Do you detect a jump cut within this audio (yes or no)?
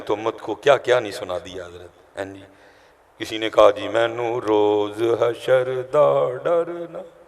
no